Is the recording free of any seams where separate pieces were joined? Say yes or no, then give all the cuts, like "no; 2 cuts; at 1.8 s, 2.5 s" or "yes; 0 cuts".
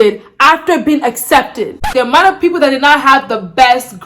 no; 1 cut; at 1.8 s